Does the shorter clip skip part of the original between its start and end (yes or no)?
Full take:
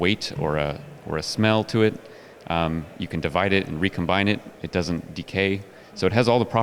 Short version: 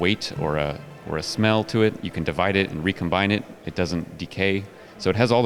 yes